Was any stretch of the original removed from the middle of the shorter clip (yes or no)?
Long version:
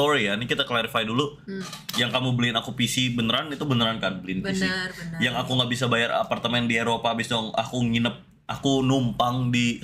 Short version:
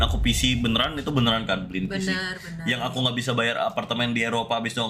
no